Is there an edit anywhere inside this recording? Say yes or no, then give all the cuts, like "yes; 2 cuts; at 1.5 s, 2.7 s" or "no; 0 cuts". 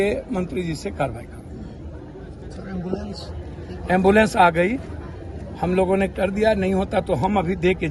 no; 0 cuts